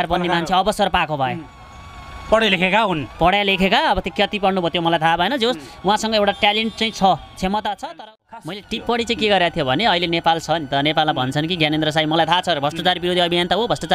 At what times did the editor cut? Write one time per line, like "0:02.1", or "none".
0:08.5